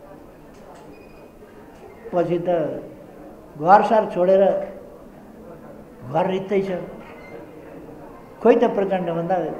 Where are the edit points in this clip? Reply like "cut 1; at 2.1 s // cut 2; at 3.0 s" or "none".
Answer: none

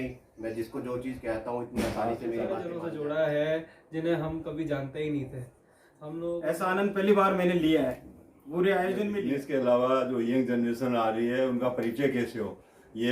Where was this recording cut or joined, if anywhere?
cut 1; at 2.7 s // cut 2; at 6.3 s // cut 3; at 9.3 s

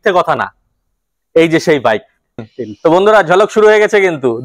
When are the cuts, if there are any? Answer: cut 1; at 2.5 s

